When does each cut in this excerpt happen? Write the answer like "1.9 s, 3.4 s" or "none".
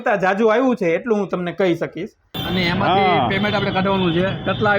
2.4 s